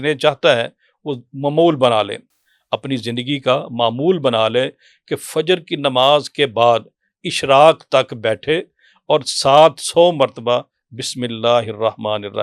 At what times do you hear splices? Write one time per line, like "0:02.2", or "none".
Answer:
none